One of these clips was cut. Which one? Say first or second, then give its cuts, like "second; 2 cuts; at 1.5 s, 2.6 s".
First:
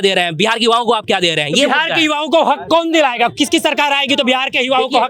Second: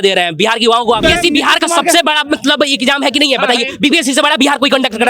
second; 1 cut; at 1.0 s